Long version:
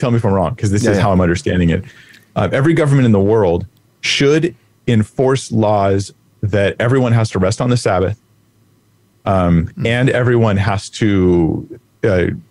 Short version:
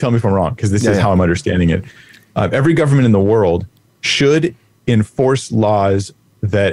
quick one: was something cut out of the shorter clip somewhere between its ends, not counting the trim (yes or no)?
no